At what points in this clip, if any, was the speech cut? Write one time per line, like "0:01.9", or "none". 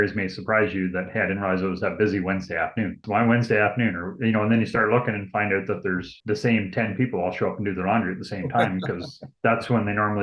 0:03.0